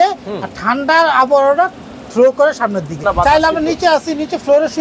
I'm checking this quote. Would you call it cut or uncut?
cut